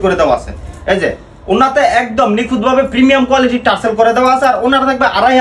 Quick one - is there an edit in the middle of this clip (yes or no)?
no